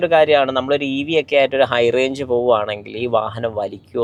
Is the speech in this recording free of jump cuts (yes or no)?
yes